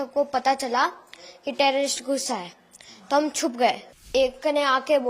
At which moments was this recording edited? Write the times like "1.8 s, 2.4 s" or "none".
4.1 s